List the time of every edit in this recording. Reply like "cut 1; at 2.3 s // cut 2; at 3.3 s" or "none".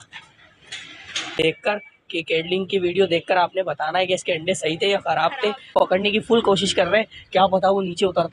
cut 1; at 1.4 s // cut 2; at 5.7 s

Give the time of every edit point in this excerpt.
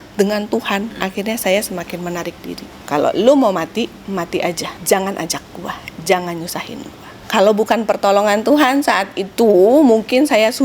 cut 1; at 0.9 s // cut 2; at 2.7 s // cut 3; at 4.7 s // cut 4; at 7.2 s

